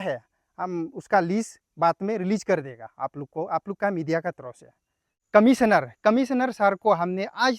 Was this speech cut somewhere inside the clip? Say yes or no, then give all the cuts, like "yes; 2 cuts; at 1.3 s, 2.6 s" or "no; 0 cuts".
yes; 1 cut; at 5.2 s